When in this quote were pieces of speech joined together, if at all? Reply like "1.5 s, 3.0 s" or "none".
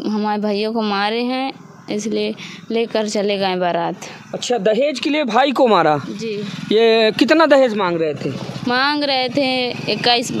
none